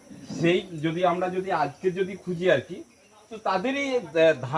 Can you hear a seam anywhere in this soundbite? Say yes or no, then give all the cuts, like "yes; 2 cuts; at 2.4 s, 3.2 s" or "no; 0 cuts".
no; 0 cuts